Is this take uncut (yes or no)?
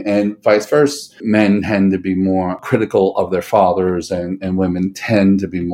no